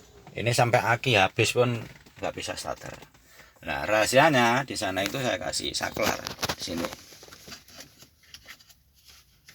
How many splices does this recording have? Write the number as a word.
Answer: zero